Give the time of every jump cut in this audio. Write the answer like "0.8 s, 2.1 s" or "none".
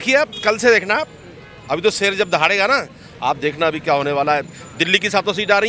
none